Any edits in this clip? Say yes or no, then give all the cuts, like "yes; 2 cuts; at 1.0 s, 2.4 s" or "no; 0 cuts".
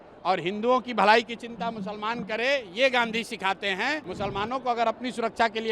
yes; 1 cut; at 4.1 s